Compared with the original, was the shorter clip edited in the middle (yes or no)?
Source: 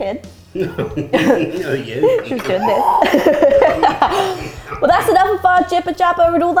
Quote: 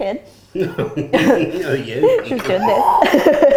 no